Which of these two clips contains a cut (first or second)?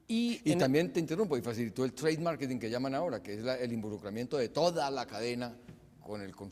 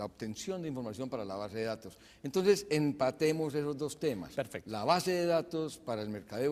first